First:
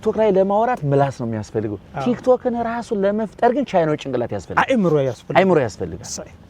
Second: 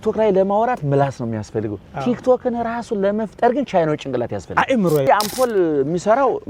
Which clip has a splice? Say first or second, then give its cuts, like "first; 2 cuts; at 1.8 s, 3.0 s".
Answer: second; 1 cut; at 5.1 s